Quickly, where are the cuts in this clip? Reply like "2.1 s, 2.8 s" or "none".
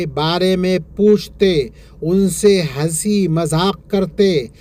none